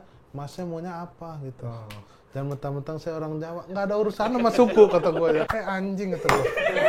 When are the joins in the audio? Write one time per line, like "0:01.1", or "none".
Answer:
0:05.5